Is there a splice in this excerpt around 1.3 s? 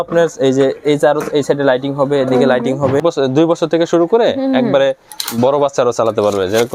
no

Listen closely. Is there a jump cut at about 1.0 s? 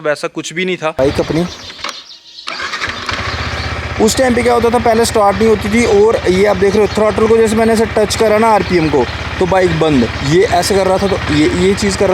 yes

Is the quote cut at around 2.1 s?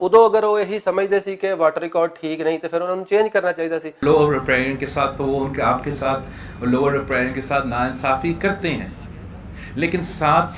no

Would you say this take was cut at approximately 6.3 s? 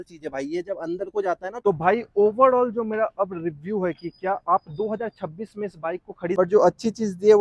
yes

